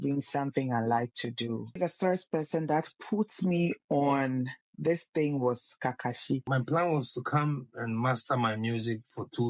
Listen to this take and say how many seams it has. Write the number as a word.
two